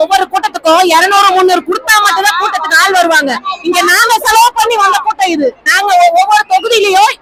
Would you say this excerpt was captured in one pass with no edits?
yes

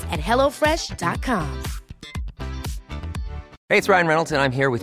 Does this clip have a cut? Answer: yes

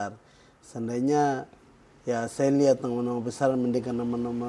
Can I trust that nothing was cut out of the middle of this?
yes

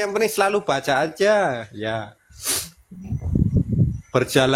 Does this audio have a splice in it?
no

